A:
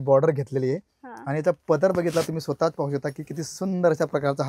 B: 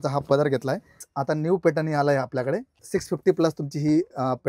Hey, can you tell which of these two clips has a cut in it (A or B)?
B